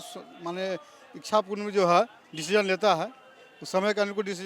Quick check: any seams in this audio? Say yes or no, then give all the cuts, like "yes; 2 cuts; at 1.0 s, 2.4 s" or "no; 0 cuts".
no; 0 cuts